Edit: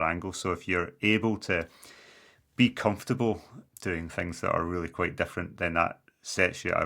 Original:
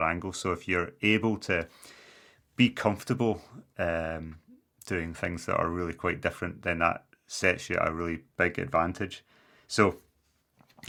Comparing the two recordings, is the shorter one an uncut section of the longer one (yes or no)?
no